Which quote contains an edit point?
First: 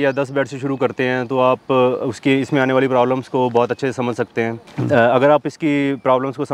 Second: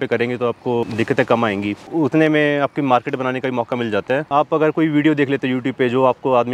second; 3 cuts; at 0.8 s, 1.8 s, 4.3 s

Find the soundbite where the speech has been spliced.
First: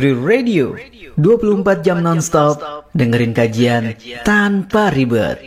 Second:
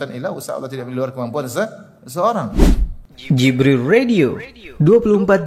second; 1 cut; at 2.5 s

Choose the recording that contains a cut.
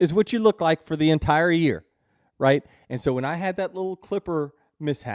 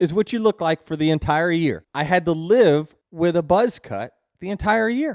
second; 2 cuts; at 1.9 s, 3.0 s

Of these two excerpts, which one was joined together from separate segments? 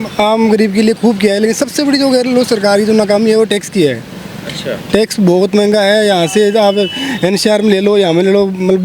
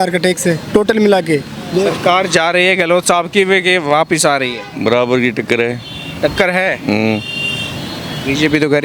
second; 1 cut; at 1.8 s

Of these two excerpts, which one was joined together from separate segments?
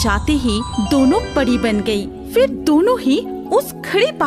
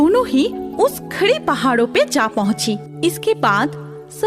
second; 1 cut; at 2.9 s

